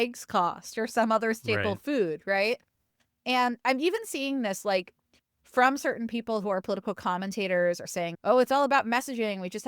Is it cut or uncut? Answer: cut